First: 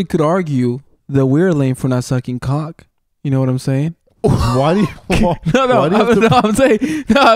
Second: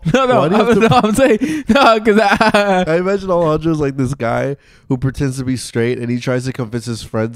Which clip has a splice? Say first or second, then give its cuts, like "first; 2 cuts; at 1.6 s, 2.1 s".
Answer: second; 1 cut; at 2.9 s